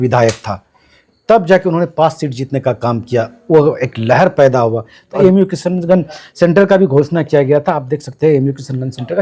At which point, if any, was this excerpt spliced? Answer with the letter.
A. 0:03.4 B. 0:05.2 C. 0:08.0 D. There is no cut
B